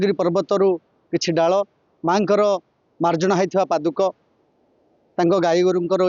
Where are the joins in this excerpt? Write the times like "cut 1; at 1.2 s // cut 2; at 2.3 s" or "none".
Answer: none